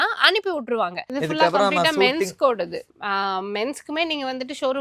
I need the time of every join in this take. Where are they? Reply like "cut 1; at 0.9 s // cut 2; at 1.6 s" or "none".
cut 1; at 1.0 s // cut 2; at 2.9 s